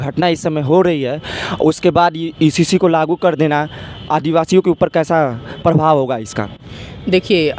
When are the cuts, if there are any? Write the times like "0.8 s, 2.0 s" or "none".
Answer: none